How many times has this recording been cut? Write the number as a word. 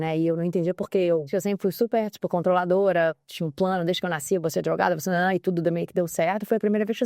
one